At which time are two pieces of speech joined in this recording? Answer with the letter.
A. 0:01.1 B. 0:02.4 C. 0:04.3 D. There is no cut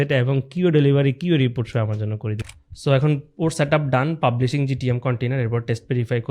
B